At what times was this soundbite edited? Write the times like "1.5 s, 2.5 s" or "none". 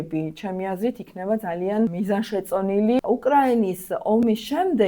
1.9 s, 3.0 s